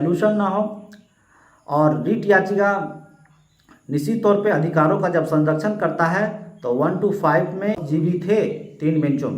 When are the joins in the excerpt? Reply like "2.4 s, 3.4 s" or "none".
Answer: 7.8 s